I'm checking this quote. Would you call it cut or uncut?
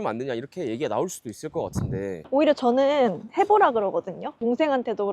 cut